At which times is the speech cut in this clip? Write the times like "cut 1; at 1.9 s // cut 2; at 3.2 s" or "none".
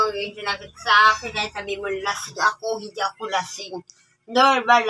none